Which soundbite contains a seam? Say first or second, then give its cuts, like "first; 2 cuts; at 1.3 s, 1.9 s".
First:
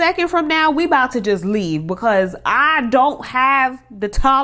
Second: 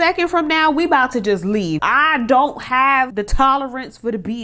second; 2 cuts; at 1.8 s, 3.1 s